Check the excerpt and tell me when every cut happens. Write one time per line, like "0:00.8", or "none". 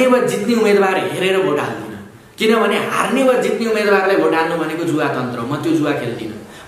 none